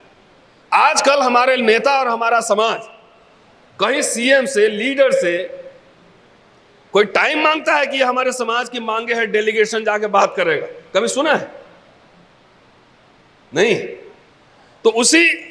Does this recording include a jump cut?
no; 0 cuts

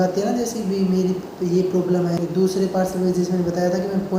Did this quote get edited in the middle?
yes; 1 cut; at 2.2 s

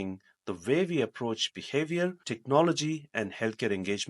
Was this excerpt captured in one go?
no; 1 cut; at 2.3 s

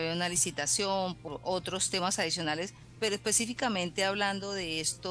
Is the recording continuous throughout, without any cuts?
no; 2 cuts; at 1.2 s, 2.8 s

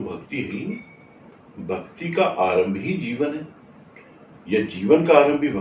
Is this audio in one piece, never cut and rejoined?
yes; 0 cuts

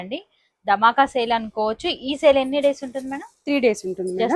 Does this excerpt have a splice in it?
no; 0 cuts

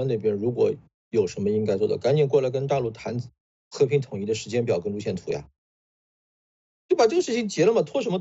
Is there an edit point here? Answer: no; 0 cuts

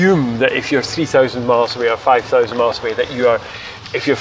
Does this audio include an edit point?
no; 0 cuts

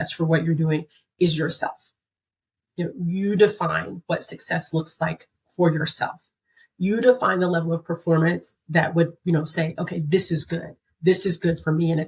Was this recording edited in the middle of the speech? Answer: no; 0 cuts

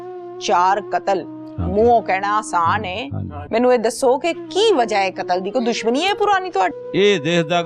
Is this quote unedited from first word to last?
yes; 0 cuts

